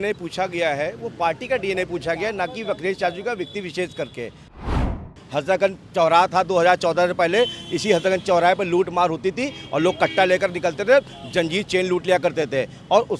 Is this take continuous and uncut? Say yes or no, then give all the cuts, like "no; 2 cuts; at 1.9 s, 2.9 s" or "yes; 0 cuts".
no; 1 cut; at 4.8 s